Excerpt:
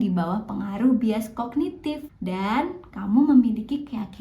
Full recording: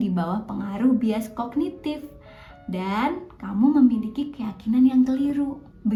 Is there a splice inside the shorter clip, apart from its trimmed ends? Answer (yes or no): yes